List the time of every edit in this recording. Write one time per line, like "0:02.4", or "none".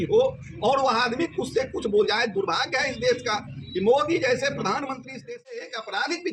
0:05.2